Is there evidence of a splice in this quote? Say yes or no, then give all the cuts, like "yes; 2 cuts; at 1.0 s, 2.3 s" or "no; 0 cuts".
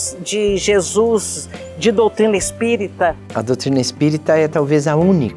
no; 0 cuts